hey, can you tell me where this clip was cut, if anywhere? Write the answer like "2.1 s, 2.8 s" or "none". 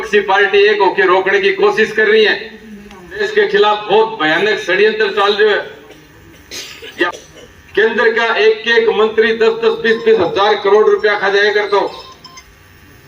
3.2 s, 7.1 s

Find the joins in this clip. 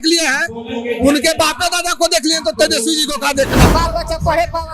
3.7 s

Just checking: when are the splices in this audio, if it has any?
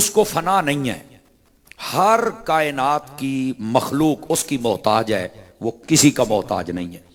none

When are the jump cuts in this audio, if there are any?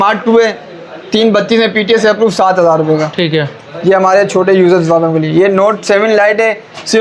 none

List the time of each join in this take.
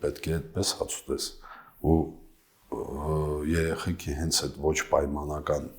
none

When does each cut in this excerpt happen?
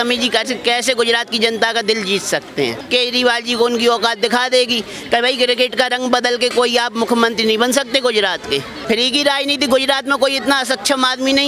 2.8 s, 8.7 s

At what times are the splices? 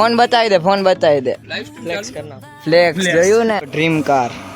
3.6 s

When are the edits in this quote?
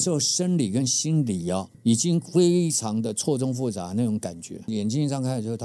4.7 s

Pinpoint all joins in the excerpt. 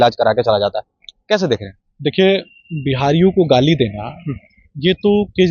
none

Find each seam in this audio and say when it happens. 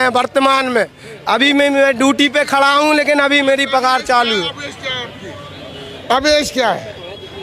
none

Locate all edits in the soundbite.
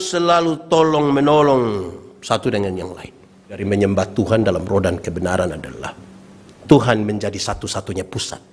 3.6 s

